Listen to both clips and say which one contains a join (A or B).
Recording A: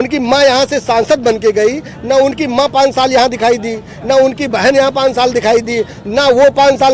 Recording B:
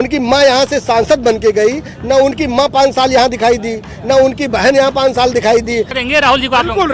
B